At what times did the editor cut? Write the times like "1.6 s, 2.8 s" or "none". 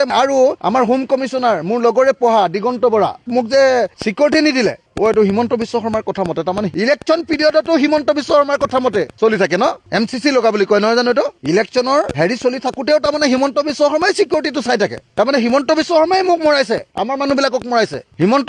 3.3 s